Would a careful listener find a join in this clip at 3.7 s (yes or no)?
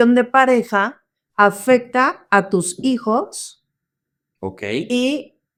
no